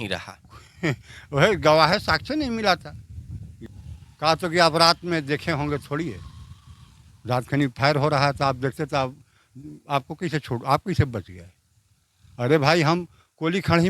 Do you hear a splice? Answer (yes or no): yes